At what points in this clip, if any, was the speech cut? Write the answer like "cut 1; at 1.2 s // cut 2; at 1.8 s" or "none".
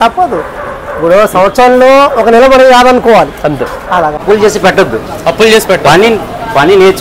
cut 1; at 4.2 s